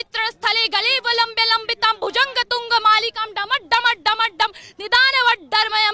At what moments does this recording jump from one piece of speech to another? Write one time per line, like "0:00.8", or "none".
none